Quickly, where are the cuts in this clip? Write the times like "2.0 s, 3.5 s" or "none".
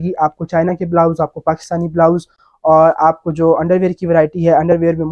none